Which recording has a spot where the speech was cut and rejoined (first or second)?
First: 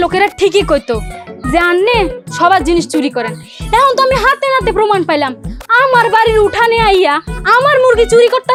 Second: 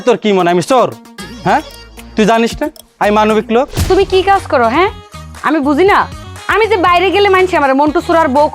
second